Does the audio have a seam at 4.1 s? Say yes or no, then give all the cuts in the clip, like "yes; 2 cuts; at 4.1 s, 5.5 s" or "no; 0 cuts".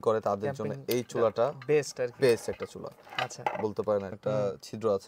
yes; 1 cut; at 4.1 s